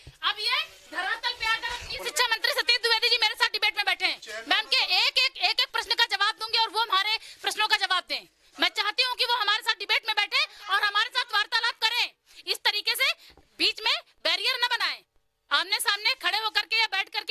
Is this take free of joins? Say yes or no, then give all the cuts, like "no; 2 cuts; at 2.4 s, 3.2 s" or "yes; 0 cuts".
no; 1 cut; at 2.0 s